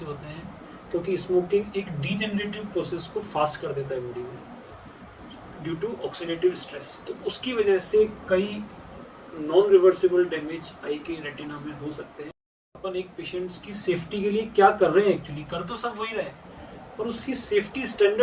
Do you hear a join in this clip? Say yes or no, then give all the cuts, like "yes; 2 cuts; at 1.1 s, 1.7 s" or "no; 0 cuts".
yes; 1 cut; at 12.4 s